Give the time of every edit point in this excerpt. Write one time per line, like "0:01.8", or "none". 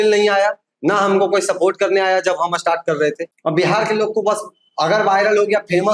0:03.3